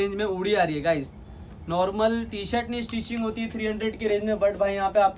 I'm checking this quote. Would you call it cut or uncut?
uncut